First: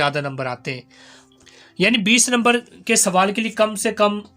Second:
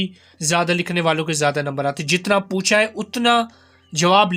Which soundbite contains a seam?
first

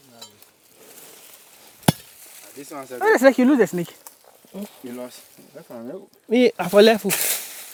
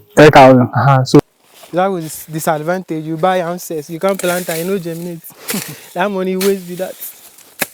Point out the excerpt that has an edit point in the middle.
second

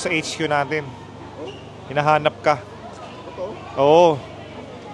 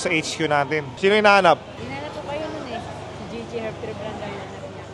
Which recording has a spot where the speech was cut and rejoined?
second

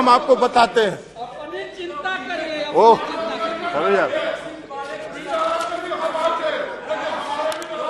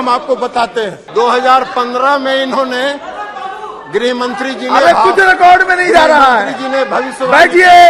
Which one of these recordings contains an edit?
second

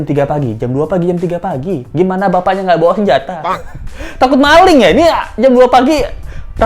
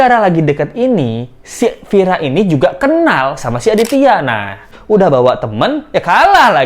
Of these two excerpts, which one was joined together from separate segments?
second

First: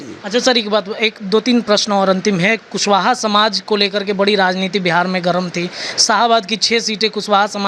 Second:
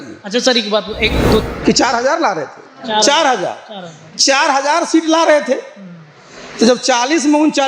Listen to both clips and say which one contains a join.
second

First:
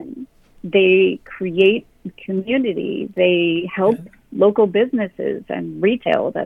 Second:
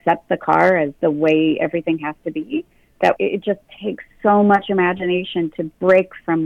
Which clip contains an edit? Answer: second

